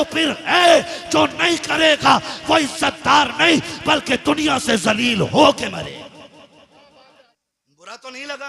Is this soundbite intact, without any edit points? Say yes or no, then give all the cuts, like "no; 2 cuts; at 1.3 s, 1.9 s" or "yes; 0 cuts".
no; 1 cut; at 7.4 s